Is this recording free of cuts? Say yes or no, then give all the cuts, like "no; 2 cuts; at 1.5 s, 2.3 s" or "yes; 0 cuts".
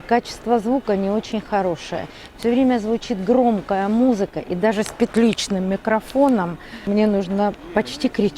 no; 1 cut; at 6.8 s